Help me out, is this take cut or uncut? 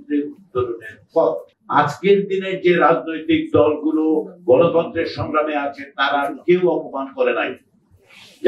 cut